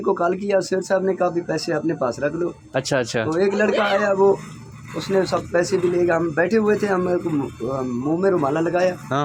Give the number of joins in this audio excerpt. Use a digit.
0